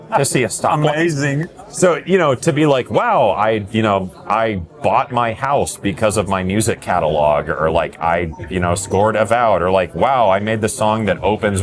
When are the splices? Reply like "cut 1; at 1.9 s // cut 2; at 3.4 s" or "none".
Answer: none